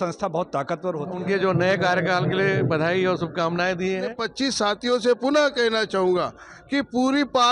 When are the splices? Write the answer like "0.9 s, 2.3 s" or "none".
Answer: 1.1 s, 4.2 s